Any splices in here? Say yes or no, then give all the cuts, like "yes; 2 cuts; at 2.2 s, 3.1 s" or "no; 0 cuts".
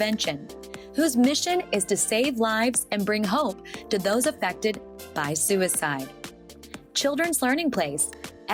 no; 0 cuts